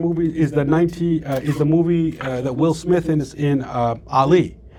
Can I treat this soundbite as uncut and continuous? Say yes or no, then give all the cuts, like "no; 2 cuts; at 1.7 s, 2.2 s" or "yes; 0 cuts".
yes; 0 cuts